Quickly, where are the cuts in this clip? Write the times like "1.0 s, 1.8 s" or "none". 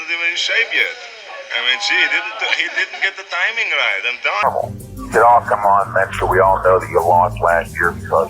4.4 s